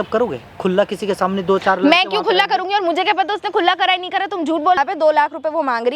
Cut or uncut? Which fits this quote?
cut